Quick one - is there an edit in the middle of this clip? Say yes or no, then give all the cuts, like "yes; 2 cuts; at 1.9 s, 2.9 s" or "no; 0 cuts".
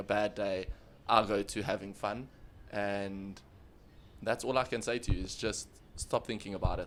no; 0 cuts